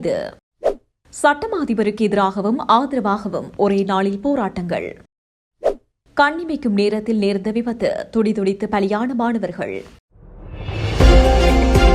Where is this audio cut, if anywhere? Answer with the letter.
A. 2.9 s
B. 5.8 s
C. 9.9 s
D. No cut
C